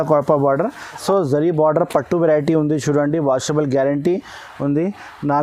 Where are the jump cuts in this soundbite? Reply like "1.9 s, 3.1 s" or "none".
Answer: 1.0 s